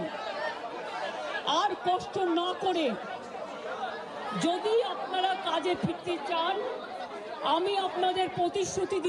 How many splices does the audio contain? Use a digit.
0